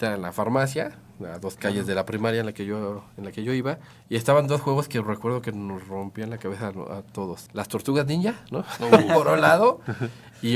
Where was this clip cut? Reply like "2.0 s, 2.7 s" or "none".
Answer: 3.9 s, 7.4 s